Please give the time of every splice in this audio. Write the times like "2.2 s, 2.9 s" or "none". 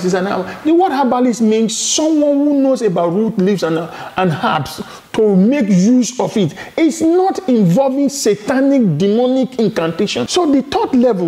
10.3 s